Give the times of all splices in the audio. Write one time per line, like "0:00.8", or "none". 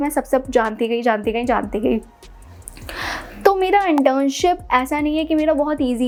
none